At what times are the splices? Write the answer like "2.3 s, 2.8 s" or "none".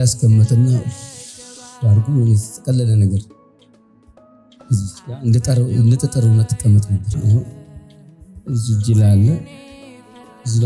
7.2 s

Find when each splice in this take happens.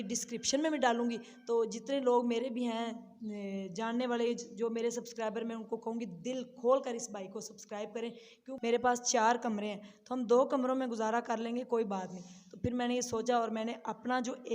8.5 s

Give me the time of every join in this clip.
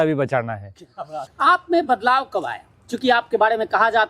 1.2 s

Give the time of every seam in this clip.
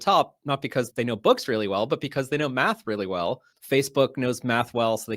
3.5 s

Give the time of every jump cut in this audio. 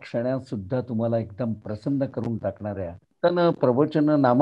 3.0 s

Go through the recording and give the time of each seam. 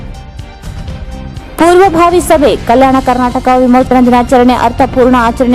0.9 s

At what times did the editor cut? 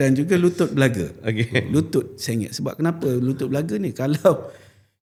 none

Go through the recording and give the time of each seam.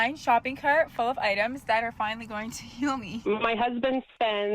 3.1 s

